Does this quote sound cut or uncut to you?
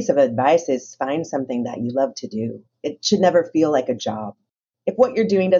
cut